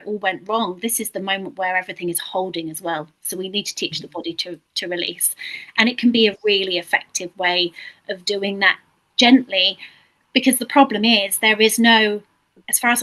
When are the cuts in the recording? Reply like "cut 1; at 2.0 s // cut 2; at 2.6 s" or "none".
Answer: none